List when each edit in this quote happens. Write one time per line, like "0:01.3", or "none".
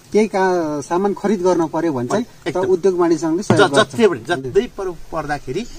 0:04.4